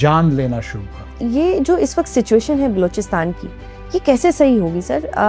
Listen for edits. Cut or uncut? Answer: cut